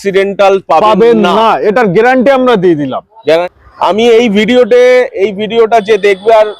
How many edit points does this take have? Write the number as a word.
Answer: one